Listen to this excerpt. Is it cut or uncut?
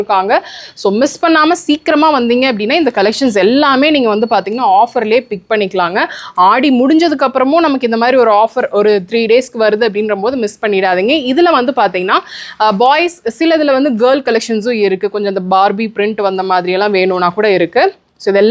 uncut